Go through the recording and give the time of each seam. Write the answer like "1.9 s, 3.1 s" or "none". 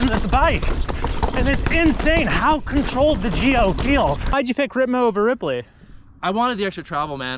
4.2 s